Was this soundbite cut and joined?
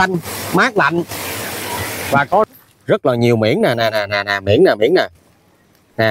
yes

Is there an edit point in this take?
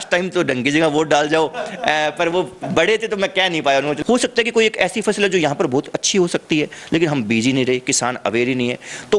yes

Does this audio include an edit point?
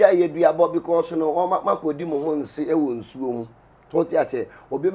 no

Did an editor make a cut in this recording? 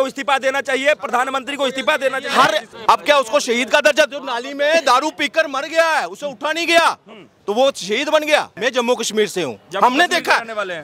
yes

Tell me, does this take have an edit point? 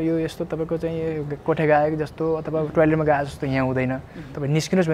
no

